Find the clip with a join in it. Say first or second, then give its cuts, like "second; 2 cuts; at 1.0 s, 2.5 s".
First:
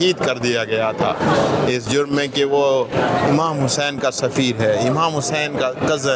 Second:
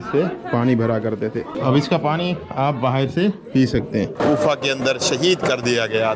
second; 2 cuts; at 1.5 s, 4.2 s